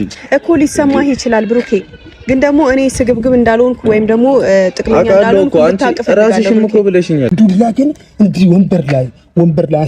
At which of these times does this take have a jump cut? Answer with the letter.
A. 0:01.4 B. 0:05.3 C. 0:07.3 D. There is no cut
C